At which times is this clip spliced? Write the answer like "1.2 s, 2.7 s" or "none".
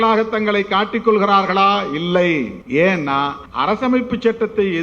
2.6 s, 3.4 s